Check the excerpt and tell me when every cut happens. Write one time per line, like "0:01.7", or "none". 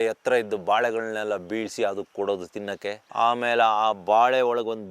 none